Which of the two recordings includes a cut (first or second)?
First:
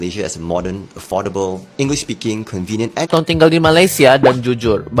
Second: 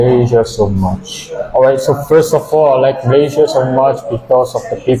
first